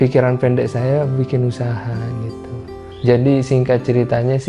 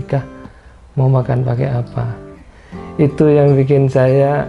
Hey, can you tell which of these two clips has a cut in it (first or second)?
first